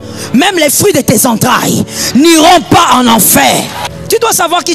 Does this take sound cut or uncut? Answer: cut